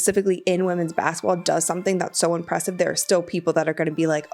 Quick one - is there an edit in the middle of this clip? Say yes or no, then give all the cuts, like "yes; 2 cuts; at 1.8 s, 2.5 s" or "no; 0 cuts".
no; 0 cuts